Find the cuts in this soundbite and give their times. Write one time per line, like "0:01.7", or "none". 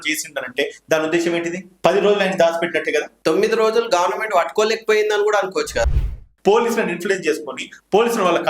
0:01.7
0:03.1
0:05.9